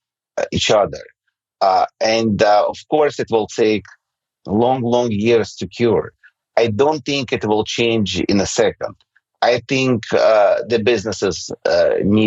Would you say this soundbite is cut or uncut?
uncut